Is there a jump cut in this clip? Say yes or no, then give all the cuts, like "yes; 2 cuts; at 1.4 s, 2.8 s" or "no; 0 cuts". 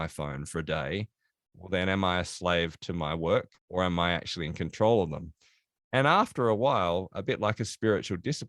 yes; 1 cut; at 3.6 s